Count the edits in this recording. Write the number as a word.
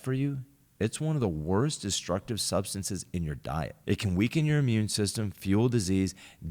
one